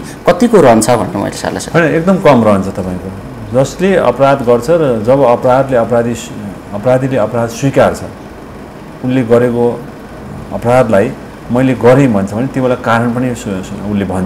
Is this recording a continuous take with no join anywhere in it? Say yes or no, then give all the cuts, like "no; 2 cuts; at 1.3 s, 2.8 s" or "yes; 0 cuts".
yes; 0 cuts